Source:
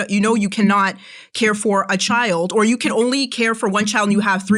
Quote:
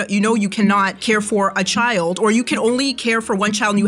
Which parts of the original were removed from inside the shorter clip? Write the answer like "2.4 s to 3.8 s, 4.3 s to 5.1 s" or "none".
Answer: 0.9 s to 1.3 s